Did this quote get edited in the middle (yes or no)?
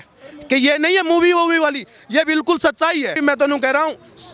yes